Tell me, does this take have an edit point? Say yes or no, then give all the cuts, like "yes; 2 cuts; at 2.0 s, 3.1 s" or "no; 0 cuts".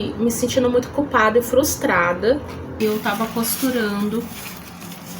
yes; 1 cut; at 2.7 s